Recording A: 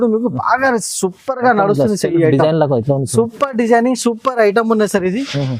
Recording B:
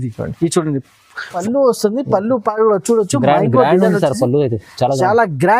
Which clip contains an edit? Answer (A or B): B